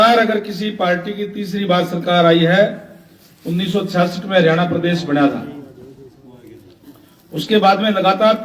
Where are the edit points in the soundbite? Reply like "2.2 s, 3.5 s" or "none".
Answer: none